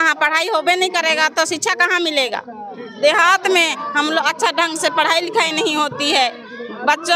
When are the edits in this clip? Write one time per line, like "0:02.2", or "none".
0:02.7